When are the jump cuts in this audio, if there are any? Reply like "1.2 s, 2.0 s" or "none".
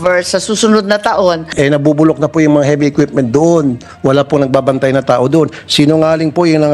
1.5 s